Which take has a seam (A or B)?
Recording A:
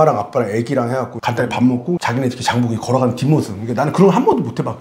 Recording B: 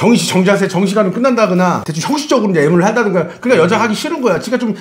A